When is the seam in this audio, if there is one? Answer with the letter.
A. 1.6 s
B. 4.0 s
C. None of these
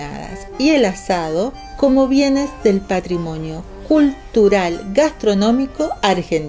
A